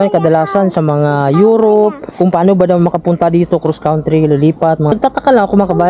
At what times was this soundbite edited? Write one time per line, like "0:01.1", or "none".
0:02.0
0:04.9